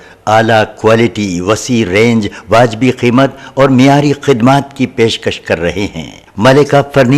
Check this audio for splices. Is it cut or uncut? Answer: uncut